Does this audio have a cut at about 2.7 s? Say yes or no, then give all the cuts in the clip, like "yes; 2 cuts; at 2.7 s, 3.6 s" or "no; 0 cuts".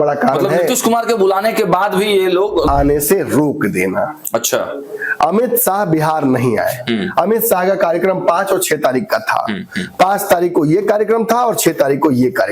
yes; 1 cut; at 2.7 s